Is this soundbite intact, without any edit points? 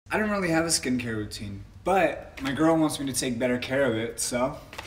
yes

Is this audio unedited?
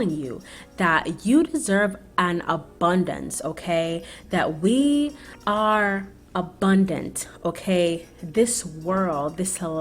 no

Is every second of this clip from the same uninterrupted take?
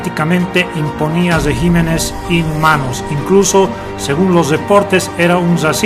yes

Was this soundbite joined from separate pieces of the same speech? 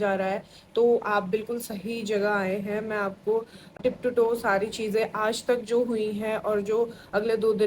yes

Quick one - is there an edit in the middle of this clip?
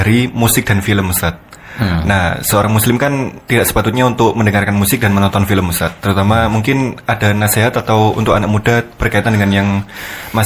no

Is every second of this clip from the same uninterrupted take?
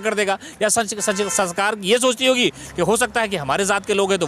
yes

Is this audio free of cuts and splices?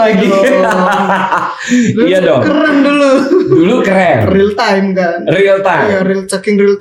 yes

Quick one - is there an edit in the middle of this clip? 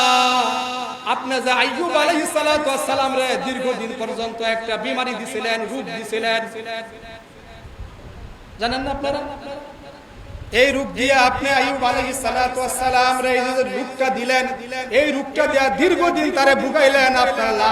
yes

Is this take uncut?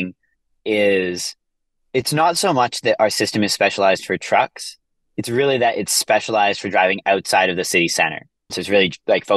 yes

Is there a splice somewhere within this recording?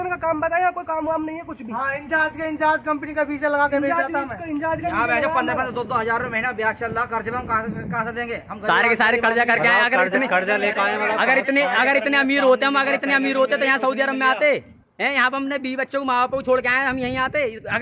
no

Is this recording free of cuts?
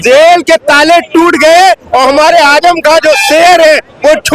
yes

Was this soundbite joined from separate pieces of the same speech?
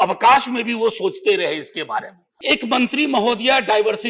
yes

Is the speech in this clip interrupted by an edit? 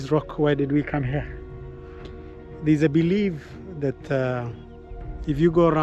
yes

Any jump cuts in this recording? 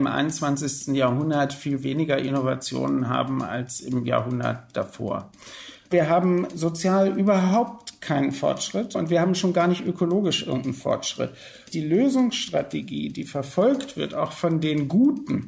yes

